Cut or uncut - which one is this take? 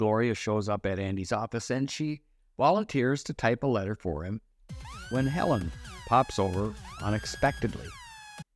uncut